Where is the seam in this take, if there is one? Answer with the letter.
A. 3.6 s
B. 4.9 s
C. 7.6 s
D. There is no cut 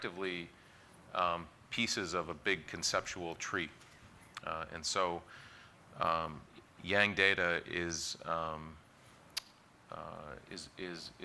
C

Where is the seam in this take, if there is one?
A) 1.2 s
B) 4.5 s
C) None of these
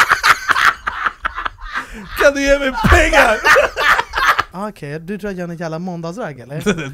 B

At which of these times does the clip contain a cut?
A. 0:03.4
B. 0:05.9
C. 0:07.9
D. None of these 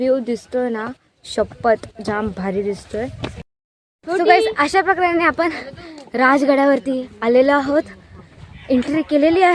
A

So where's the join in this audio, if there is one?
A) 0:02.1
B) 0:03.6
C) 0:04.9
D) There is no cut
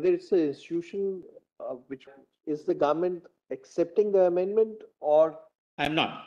A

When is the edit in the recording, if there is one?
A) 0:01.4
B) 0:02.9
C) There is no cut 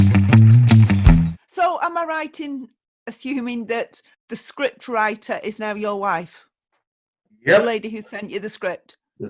A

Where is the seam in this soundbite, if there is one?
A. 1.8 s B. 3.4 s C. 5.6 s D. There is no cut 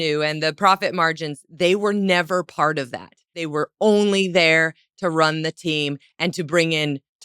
B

